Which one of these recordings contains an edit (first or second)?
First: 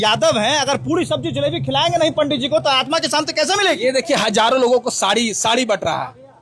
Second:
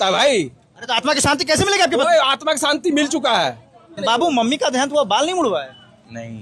second